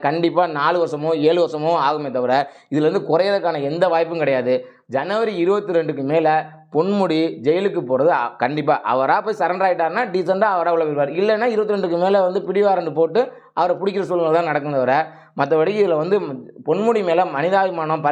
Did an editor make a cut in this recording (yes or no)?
no